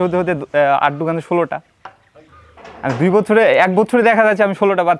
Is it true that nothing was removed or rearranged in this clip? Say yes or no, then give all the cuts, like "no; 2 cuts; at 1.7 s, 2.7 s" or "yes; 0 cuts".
yes; 0 cuts